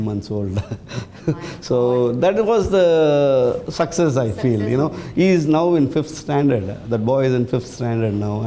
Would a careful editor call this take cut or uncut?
uncut